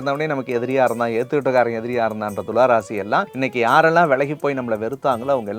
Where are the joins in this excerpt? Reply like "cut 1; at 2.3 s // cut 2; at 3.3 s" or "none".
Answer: cut 1; at 3.3 s